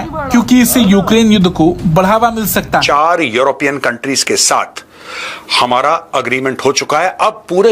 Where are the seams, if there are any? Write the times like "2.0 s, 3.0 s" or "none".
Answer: 2.9 s